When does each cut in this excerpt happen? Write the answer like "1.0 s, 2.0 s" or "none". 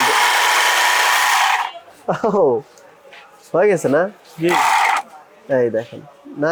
none